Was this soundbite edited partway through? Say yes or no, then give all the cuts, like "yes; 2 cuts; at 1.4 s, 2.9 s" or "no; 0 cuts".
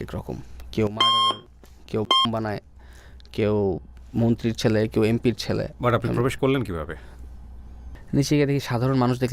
yes; 1 cut; at 7.7 s